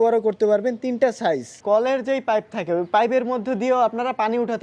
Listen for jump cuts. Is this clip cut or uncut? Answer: cut